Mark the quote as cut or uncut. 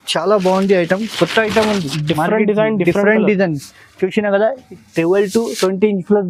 uncut